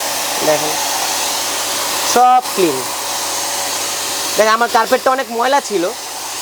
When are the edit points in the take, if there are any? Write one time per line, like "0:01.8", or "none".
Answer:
none